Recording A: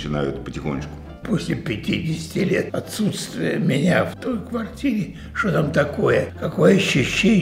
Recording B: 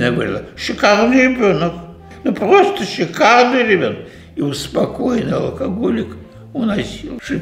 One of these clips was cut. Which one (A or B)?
A